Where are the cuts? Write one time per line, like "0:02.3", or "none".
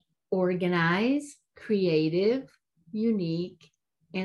none